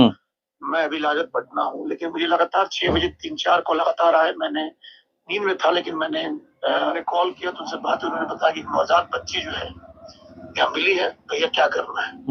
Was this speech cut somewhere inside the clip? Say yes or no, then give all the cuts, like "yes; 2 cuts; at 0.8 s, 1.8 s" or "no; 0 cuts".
yes; 1 cut; at 6.9 s